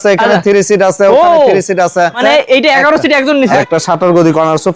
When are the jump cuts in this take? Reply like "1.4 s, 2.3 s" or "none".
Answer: 2.2 s, 3.6 s